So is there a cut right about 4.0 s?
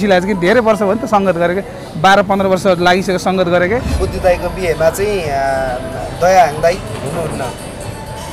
yes; 1 cut; at 4.0 s

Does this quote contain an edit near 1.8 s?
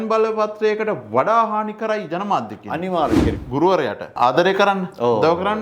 no; 2 cuts; at 3.4 s, 4.1 s

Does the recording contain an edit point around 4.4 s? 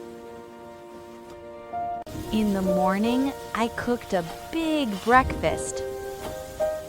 no; 1 cut; at 2.1 s

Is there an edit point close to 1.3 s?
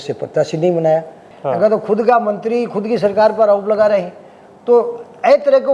yes; 1 cut; at 1.3 s

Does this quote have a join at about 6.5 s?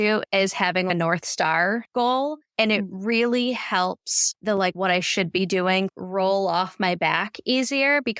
no; 1 cut; at 1.9 s

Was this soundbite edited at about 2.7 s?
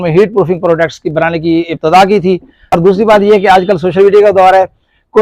yes; 1 cut; at 2.7 s

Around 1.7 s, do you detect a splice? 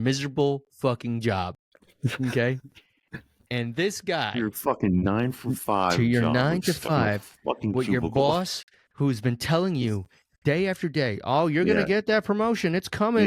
no; 0 cuts

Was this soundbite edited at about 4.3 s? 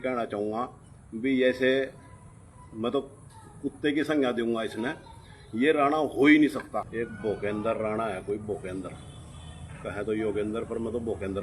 no; 1 cut; at 6.9 s

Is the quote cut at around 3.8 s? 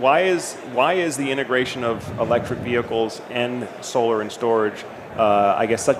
no; 0 cuts

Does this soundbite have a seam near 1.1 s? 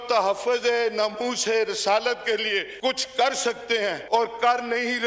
no; 2 cuts; at 2.7 s, 4.0 s

